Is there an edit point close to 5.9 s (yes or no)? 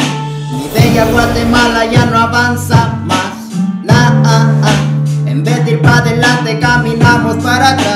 no